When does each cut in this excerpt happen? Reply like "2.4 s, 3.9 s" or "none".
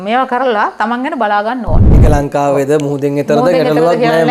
1.9 s

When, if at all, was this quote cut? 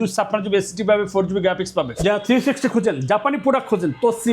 1.9 s

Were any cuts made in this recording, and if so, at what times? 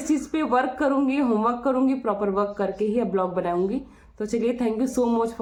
none

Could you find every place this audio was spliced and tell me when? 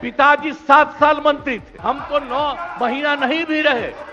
1.7 s

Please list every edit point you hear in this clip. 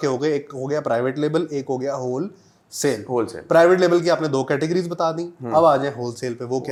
none

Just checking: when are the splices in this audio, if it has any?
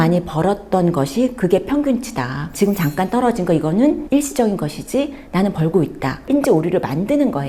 2.4 s, 6.2 s

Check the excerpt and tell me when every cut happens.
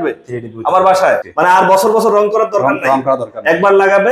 1.3 s

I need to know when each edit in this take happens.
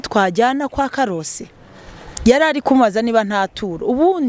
none

